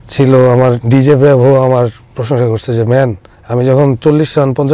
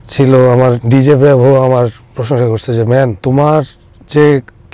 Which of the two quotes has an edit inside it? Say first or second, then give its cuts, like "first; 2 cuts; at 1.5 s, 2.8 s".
second; 1 cut; at 3.2 s